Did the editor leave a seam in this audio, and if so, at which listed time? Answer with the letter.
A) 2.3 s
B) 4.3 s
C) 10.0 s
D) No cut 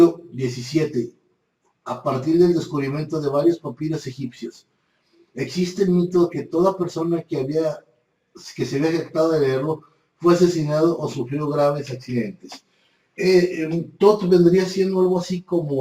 A